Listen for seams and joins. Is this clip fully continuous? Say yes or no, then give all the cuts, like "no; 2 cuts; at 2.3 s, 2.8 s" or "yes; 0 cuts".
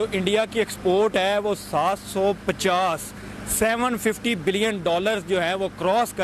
yes; 0 cuts